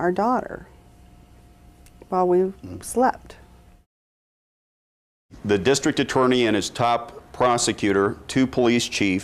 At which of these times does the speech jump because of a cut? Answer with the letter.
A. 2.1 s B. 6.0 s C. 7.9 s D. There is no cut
C